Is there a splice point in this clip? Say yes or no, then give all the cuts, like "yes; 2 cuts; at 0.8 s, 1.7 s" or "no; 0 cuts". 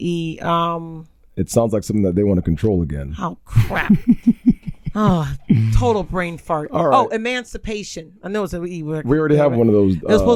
no; 0 cuts